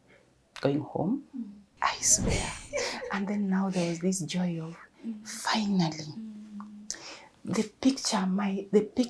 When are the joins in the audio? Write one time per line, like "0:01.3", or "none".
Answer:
0:01.7